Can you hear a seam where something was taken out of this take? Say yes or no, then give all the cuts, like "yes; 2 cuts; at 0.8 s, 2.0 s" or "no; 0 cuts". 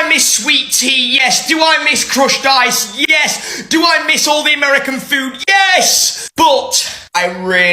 no; 0 cuts